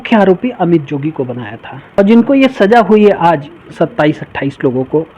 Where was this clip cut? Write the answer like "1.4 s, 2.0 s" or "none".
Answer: 2.0 s